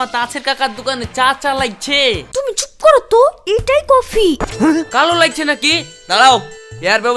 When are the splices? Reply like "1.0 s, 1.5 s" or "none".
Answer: 2.3 s, 4.5 s

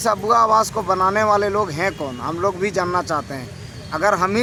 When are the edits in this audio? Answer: none

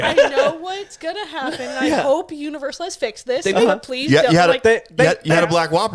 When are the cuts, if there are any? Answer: none

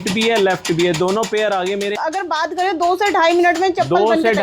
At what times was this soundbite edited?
2.0 s

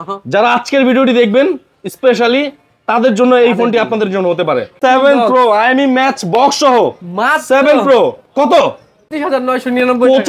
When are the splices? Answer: 4.8 s, 9.1 s

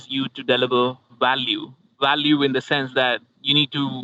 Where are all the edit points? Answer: 1.8 s

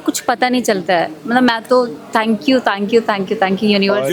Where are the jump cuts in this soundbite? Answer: none

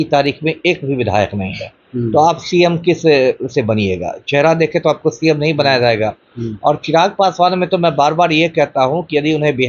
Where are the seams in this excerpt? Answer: none

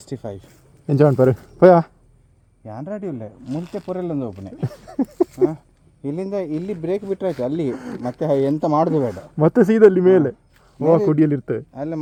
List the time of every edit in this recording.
none

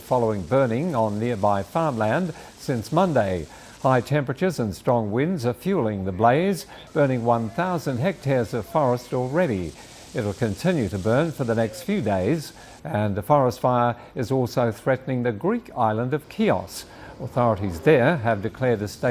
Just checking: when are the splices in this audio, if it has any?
17.8 s

